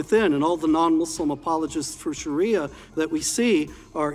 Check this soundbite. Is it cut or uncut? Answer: uncut